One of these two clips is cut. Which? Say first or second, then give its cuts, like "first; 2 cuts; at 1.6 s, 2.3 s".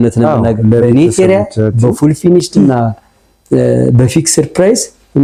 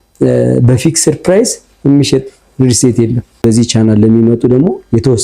second; 1 cut; at 3.4 s